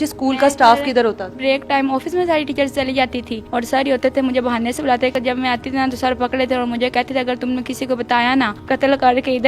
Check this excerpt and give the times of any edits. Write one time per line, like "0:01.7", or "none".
0:01.4
0:03.3
0:05.1
0:08.6